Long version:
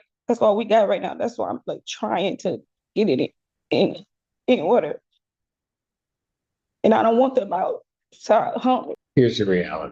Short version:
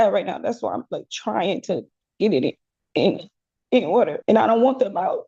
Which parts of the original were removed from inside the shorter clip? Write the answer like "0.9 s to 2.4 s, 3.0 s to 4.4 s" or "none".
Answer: 4.9 s to 6.7 s

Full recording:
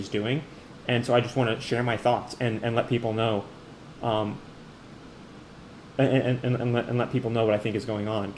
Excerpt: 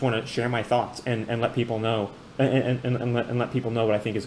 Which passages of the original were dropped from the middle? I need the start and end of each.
3.6 s to 5.8 s

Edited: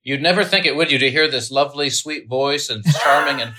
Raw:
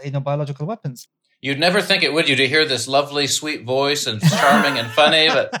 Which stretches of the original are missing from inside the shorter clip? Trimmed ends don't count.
none

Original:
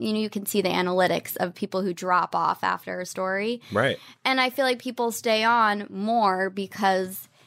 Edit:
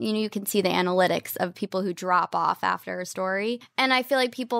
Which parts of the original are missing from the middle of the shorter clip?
3.6 s to 4.1 s

